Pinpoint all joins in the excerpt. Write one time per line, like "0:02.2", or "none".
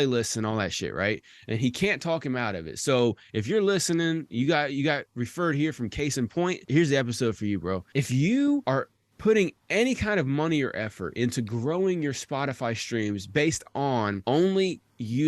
0:06.7
0:07.9
0:08.6
0:14.2